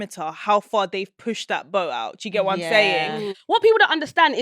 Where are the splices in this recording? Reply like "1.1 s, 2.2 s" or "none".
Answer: 3.4 s